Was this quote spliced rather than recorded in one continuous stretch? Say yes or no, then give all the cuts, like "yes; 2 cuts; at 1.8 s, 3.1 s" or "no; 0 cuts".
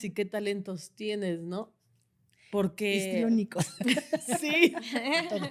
no; 0 cuts